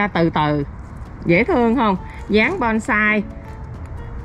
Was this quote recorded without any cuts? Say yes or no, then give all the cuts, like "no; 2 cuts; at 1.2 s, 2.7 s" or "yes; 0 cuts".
yes; 0 cuts